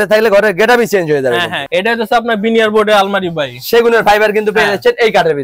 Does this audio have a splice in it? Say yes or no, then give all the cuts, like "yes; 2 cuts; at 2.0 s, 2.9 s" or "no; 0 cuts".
yes; 1 cut; at 1.6 s